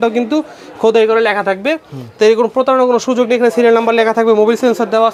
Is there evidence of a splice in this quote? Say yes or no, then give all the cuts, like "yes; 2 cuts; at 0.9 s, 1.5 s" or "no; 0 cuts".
no; 0 cuts